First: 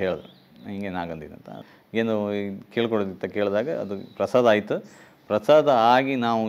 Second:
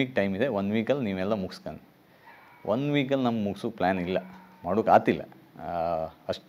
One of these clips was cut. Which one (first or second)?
first